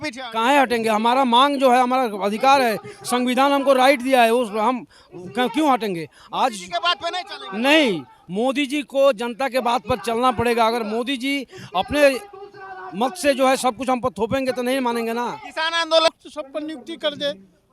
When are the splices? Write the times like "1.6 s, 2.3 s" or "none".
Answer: 16.1 s

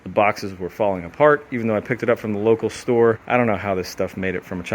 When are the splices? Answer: 3.2 s

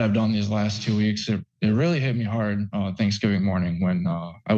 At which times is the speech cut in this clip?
none

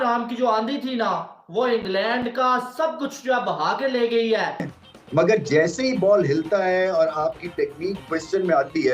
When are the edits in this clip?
4.7 s

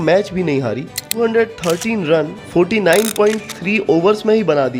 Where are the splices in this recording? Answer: 1.2 s

